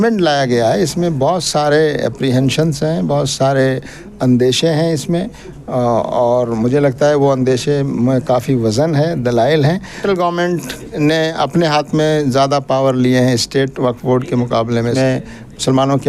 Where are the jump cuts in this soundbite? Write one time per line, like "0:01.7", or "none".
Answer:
0:10.0
0:14.8

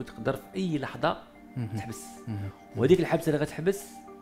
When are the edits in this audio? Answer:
0:01.4

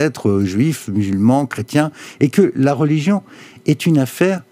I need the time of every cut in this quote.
none

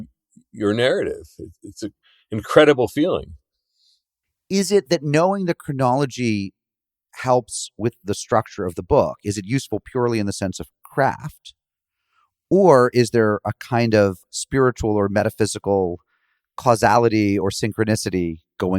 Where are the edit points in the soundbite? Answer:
0:14.2

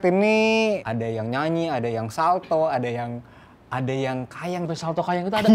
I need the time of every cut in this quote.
0:00.9
0:04.6

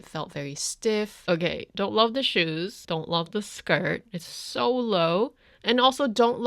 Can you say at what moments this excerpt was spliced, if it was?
0:01.2
0:02.8

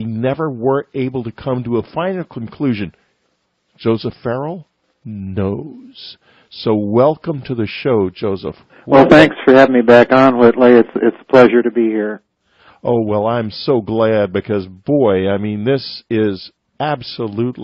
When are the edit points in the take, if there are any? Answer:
none

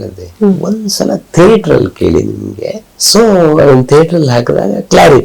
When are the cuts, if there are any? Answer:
0:02.8

